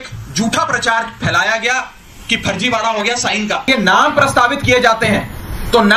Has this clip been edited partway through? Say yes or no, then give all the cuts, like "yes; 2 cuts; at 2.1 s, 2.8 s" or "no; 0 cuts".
yes; 1 cut; at 3.6 s